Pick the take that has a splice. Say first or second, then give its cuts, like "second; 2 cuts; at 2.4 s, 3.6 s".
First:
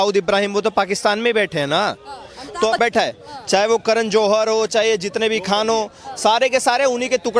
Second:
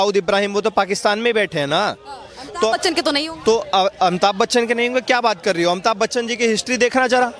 first; 1 cut; at 2.8 s